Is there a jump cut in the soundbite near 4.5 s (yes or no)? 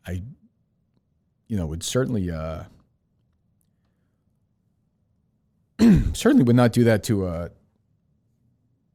no